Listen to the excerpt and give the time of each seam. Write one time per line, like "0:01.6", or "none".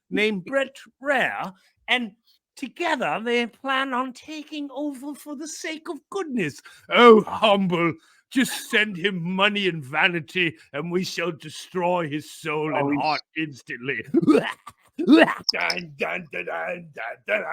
0:15.4